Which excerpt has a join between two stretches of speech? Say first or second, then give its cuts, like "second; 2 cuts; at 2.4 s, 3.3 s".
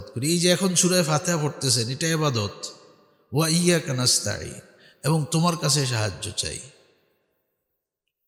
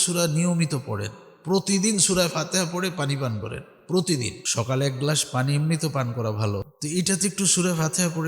second; 2 cuts; at 4.4 s, 6.7 s